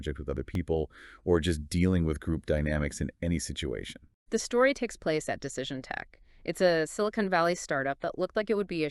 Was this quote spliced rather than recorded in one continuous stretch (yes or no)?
yes